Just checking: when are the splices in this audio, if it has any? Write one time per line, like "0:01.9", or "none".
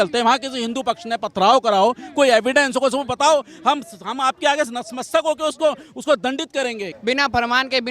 0:06.9